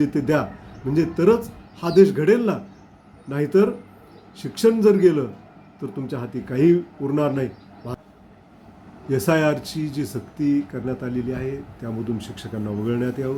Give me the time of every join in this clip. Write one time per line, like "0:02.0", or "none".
none

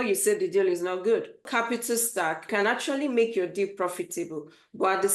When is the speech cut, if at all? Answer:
0:01.5
0:02.5

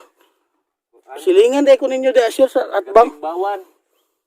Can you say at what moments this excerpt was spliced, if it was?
none

